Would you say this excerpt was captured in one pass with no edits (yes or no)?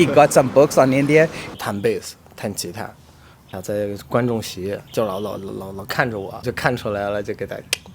no